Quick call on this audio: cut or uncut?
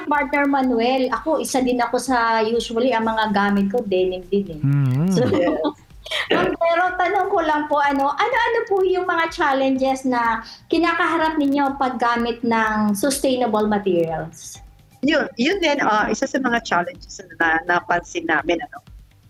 uncut